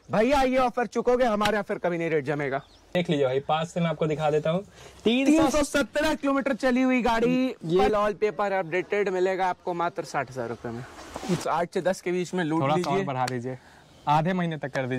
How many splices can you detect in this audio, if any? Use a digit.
3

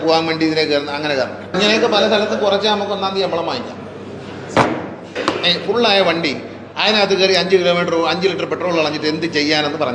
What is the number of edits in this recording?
2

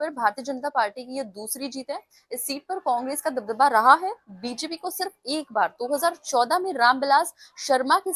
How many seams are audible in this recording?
0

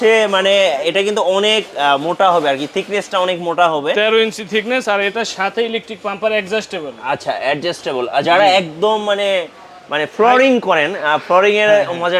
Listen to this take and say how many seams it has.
0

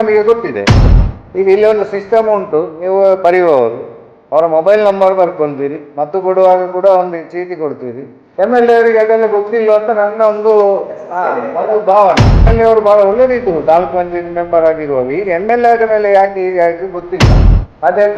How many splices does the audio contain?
2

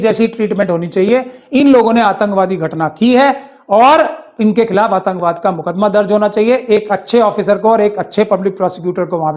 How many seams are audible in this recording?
0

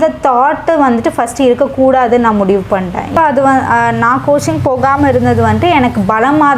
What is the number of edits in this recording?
1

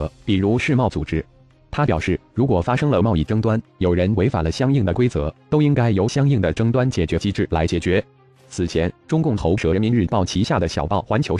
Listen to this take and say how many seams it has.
1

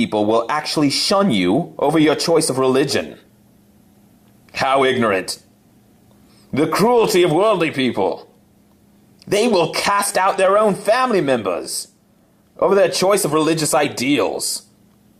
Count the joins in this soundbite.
0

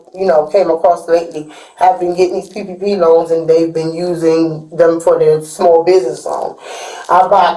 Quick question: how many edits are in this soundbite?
0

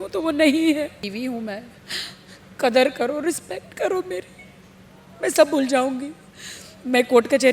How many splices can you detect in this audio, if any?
1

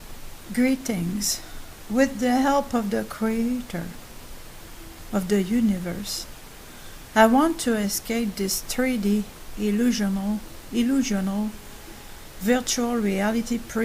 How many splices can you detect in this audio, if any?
0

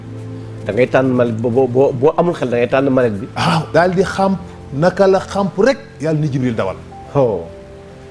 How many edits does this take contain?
1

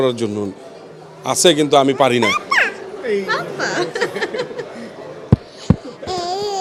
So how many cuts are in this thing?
0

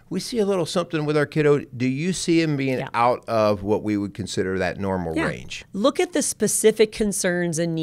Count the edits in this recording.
1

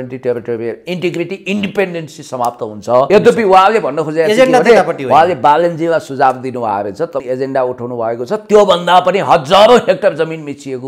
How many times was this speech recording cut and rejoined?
2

